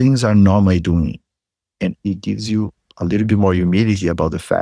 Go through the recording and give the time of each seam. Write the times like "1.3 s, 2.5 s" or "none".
2.0 s